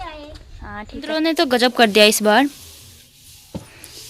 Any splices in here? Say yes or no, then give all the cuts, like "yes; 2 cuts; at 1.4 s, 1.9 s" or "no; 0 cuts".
yes; 1 cut; at 1.2 s